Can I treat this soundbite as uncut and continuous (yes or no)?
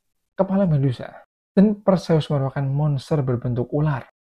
yes